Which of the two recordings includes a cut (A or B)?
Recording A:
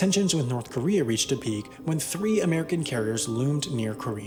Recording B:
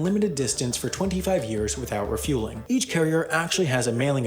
B